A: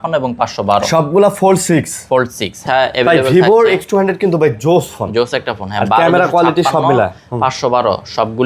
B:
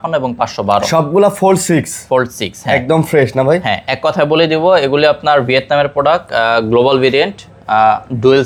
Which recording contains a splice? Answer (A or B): A